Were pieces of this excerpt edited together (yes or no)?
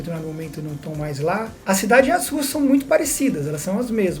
yes